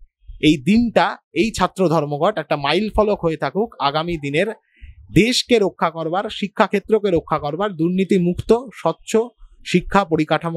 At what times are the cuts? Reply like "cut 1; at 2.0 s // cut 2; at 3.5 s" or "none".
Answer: none